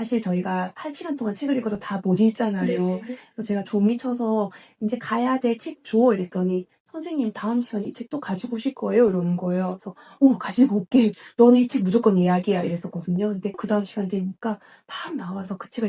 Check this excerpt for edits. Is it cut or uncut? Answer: uncut